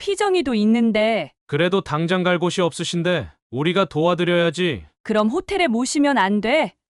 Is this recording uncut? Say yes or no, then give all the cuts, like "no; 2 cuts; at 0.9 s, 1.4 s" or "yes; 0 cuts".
no; 1 cut; at 1.3 s